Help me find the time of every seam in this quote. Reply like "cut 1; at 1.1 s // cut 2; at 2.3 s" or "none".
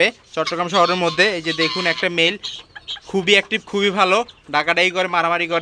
none